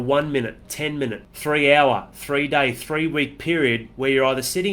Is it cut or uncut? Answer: cut